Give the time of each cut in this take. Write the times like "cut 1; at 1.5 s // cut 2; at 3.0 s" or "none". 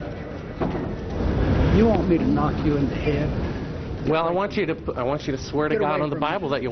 cut 1; at 1.1 s